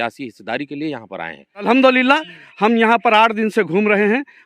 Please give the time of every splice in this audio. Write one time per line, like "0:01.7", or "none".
0:01.6